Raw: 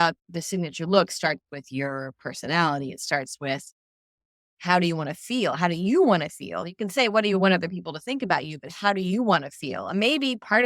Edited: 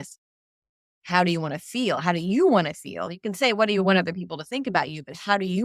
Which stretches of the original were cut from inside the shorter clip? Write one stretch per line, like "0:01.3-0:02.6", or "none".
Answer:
none